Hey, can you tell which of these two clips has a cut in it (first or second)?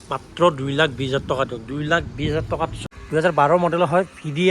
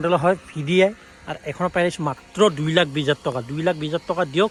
first